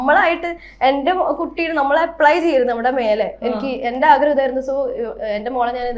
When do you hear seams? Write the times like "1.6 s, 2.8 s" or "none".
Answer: none